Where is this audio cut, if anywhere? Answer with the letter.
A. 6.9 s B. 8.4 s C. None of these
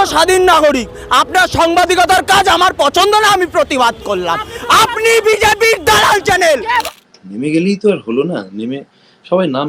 A